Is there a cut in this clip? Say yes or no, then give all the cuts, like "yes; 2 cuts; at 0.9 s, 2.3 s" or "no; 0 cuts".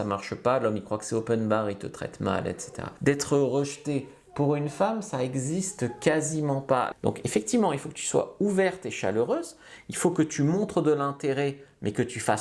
yes; 2 cuts; at 2.9 s, 6.9 s